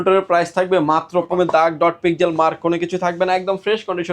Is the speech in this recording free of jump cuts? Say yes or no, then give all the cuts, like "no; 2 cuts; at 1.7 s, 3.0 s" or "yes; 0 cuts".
no; 1 cut; at 1.3 s